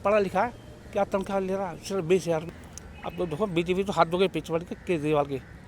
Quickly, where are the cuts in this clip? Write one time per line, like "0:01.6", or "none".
0:02.5

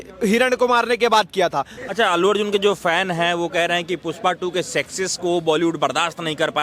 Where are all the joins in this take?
0:01.7

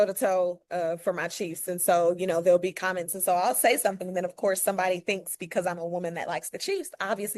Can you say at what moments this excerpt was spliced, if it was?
none

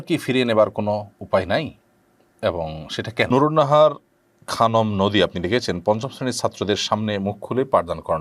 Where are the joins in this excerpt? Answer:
0:03.3

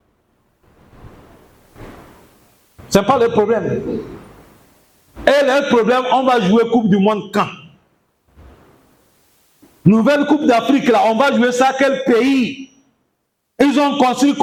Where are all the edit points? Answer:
none

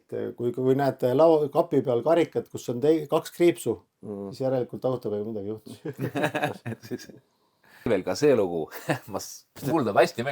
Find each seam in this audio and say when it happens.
0:07.9

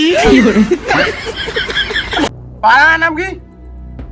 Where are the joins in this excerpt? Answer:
0:02.3

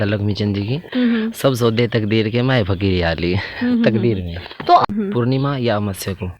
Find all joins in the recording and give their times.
0:04.9

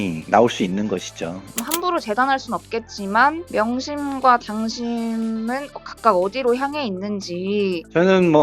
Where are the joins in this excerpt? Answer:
none

